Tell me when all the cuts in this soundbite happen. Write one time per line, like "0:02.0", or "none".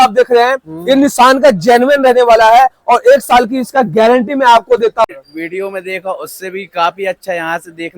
0:05.1